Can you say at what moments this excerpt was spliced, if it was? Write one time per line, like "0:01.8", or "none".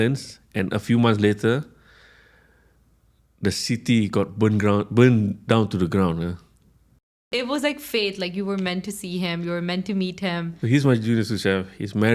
0:07.3
0:10.5